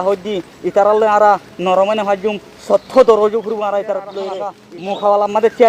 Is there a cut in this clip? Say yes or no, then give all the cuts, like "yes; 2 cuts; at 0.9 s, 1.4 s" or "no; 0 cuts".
yes; 1 cut; at 4.7 s